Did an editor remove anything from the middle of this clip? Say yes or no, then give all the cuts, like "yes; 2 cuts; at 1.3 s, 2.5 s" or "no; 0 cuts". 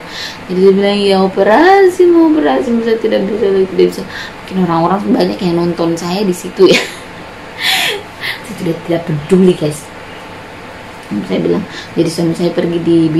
no; 0 cuts